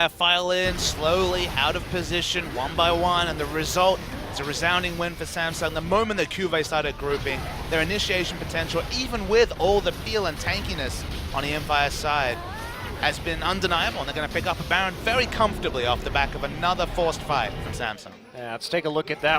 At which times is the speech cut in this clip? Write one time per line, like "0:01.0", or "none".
0:11.1